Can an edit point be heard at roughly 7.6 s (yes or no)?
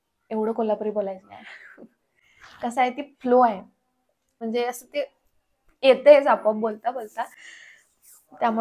no